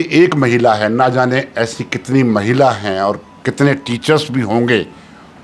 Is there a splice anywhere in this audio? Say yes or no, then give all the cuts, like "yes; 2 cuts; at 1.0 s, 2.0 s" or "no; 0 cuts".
no; 0 cuts